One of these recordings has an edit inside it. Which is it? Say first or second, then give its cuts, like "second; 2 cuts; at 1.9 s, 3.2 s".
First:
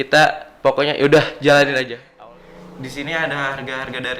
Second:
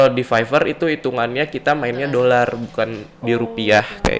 first; 1 cut; at 2.0 s